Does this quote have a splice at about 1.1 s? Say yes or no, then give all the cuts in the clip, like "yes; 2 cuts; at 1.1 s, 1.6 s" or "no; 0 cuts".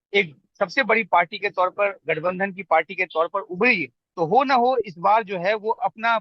no; 1 cut; at 4.0 s